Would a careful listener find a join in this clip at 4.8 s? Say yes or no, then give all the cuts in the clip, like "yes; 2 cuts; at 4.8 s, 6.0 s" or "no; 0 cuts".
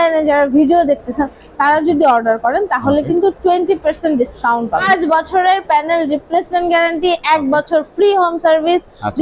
yes; 1 cut; at 4.8 s